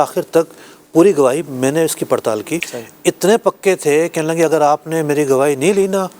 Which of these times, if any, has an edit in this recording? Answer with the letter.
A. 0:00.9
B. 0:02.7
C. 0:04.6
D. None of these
B